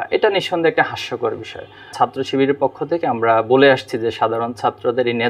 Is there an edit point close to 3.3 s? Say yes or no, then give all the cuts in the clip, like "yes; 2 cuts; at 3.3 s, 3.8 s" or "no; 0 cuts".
no; 1 cut; at 1.9 s